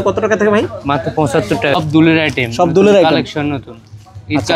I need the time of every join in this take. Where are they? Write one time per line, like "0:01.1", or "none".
0:01.7

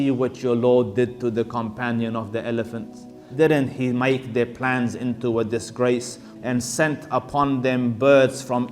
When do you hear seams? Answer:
0:03.2
0:06.3

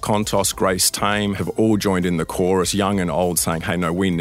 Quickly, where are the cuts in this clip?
0:01.4

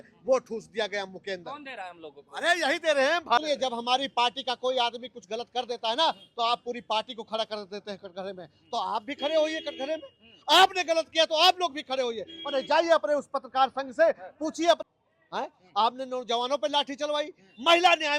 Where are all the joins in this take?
0:03.4
0:14.8

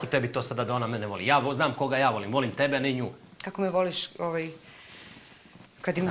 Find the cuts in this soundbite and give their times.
0:03.9

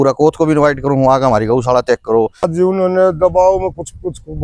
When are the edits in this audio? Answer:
0:02.5

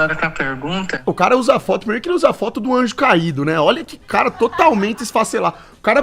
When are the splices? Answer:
none

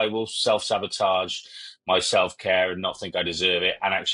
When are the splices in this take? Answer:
none

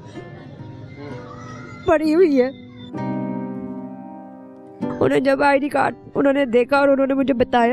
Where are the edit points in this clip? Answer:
none

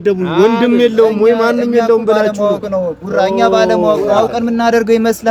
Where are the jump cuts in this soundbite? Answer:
none

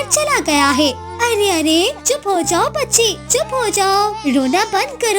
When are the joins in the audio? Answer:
0:01.0

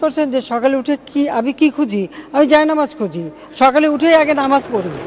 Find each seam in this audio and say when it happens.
none

